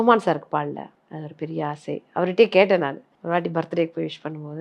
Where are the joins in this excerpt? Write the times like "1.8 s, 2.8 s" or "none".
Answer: 1.0 s, 3.1 s

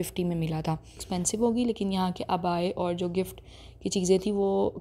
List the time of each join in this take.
1.0 s

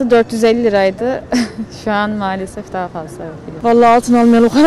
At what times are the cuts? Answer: none

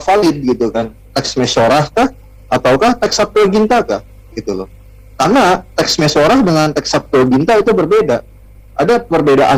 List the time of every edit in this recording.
none

